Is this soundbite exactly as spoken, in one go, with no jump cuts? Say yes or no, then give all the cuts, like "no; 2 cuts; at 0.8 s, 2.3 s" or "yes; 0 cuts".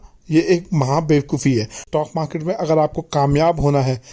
no; 1 cut; at 1.8 s